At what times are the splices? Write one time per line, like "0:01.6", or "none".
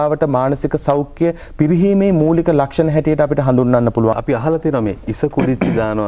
0:04.2